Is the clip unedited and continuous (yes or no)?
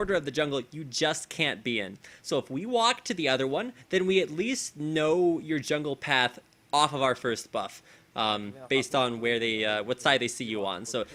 yes